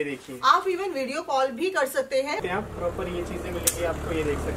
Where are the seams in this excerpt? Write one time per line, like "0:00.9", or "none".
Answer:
0:02.4